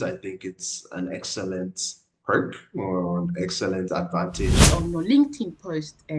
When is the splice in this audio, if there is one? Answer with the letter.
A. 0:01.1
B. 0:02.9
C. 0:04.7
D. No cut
C